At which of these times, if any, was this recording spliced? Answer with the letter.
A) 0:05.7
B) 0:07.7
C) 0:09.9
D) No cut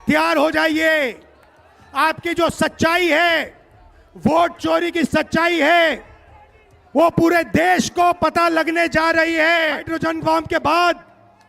C